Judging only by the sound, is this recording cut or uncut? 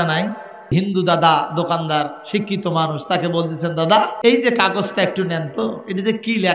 cut